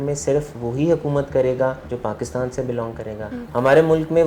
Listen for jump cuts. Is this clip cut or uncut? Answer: cut